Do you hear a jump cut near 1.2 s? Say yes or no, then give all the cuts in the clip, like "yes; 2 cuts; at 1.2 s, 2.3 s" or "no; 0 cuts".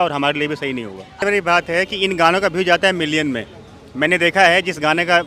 yes; 1 cut; at 1.2 s